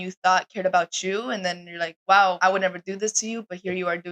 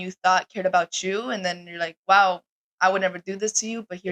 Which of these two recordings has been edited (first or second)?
first